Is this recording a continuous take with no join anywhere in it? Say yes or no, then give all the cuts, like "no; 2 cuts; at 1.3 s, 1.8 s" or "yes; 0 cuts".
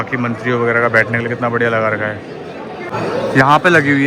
no; 1 cut; at 2.9 s